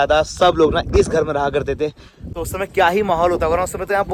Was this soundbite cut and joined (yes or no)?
no